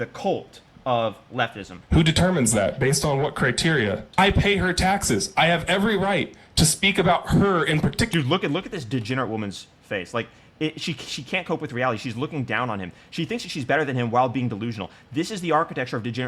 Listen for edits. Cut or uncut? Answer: cut